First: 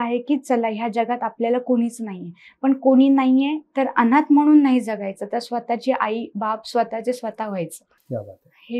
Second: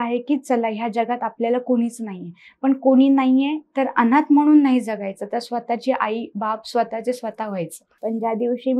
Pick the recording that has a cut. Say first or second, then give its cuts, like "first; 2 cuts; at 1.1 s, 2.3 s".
second; 1 cut; at 7.8 s